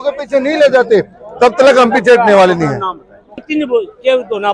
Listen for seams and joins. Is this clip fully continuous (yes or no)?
no